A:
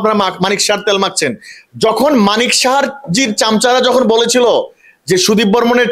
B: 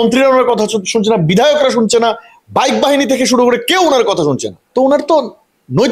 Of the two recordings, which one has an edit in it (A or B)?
B